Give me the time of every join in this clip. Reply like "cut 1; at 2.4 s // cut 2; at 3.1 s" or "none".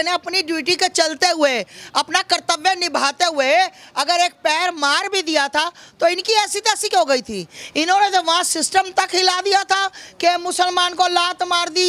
none